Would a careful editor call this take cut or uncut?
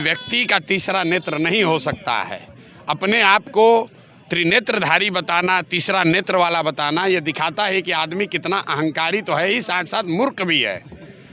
uncut